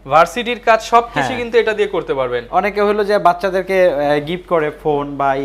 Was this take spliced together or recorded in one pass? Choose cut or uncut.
uncut